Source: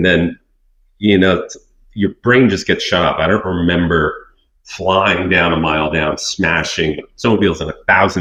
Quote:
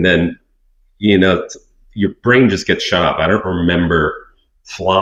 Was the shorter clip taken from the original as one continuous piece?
yes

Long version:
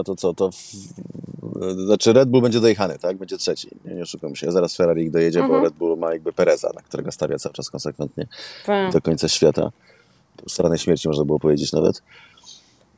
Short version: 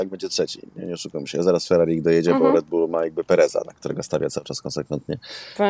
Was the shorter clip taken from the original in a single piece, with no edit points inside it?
yes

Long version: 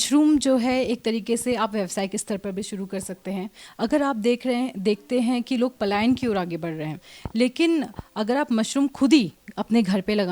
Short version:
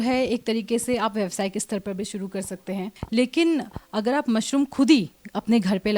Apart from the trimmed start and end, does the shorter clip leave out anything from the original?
yes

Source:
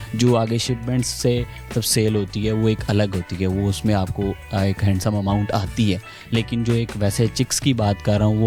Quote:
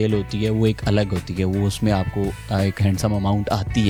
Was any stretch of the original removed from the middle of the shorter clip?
no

